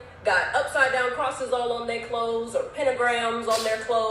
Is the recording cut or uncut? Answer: uncut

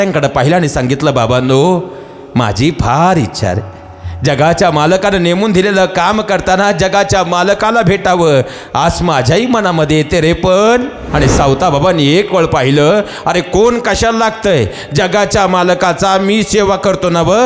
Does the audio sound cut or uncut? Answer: cut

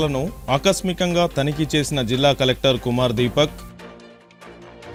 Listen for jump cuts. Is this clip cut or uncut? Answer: uncut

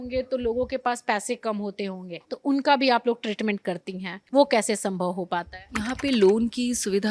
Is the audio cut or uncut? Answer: uncut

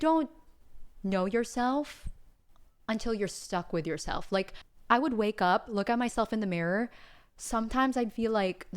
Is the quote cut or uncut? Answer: cut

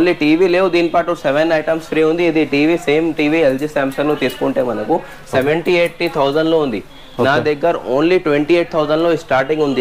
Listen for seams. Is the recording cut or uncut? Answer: uncut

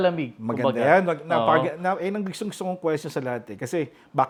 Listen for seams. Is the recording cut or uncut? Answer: uncut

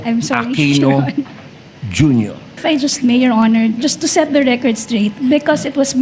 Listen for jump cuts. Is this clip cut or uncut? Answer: cut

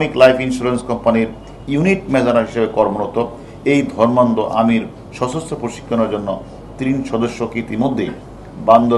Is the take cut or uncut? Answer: uncut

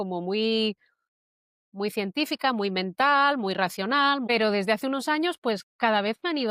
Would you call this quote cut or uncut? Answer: cut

